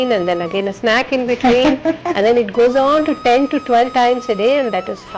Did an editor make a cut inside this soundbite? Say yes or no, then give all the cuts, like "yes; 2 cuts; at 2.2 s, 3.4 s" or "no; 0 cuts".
no; 0 cuts